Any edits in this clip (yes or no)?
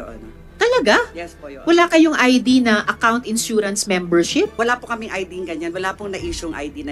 yes